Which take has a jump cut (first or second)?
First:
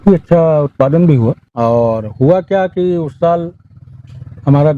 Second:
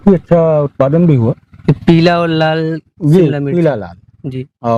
first